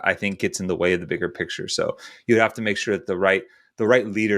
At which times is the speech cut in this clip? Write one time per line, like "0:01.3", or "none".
0:01.6